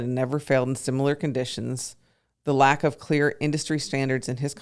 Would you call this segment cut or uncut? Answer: uncut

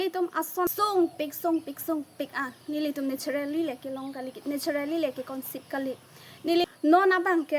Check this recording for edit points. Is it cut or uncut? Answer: cut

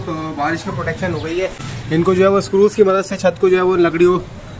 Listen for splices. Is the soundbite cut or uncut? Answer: uncut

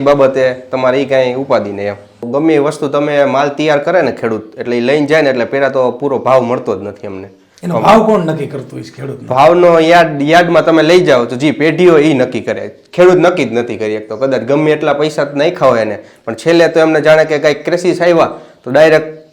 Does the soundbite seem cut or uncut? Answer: cut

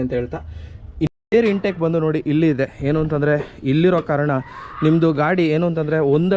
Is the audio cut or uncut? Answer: cut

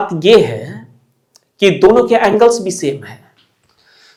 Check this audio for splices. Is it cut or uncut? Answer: uncut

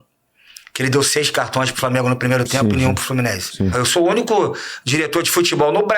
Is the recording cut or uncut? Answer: cut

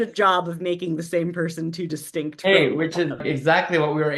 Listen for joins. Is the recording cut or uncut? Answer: cut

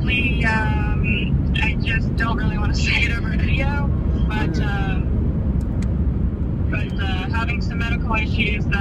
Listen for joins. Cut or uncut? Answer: uncut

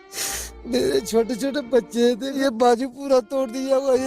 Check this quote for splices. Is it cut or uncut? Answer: cut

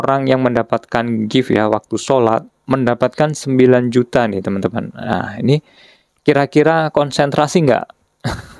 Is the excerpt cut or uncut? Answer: uncut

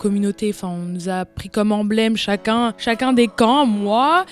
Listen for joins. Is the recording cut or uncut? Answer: uncut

